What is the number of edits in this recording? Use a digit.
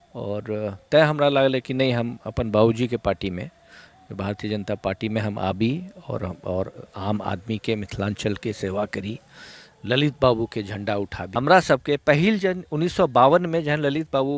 1